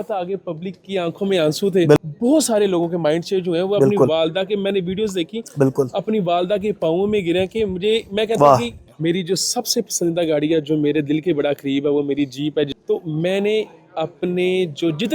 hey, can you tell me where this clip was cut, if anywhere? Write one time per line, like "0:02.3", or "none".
0:02.0
0:08.8
0:12.8